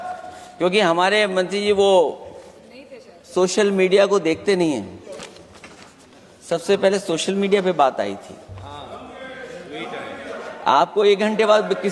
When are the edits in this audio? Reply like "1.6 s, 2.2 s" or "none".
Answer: none